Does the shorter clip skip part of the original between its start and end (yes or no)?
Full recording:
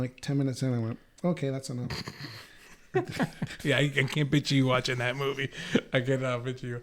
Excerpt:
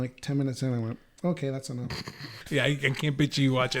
yes